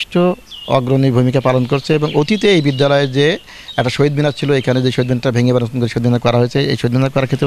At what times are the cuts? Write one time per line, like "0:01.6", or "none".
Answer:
none